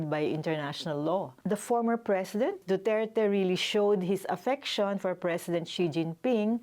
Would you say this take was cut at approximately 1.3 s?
yes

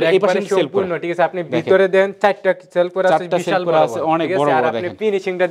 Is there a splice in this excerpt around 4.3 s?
no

